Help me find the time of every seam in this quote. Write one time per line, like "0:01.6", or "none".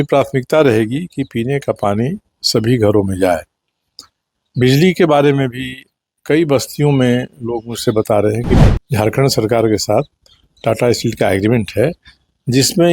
0:08.6